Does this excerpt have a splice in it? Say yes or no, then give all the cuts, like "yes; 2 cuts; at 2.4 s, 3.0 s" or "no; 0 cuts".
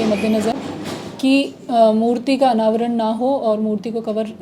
no; 0 cuts